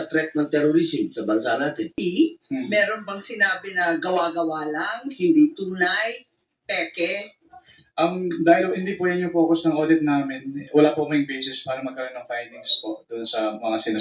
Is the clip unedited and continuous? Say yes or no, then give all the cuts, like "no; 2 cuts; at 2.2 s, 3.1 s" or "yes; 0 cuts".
no; 1 cut; at 1.9 s